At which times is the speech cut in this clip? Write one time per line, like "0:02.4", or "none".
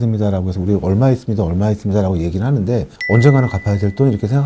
0:02.9